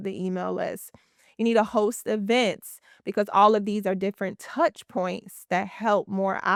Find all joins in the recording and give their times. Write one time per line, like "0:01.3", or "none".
none